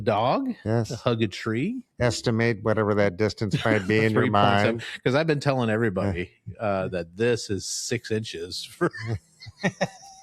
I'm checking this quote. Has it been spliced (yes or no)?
no